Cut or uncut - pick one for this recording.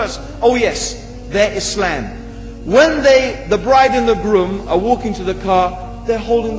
cut